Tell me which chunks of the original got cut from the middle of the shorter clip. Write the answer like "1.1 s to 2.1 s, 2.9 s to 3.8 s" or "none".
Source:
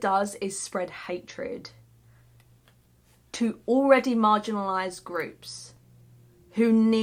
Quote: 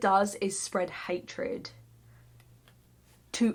none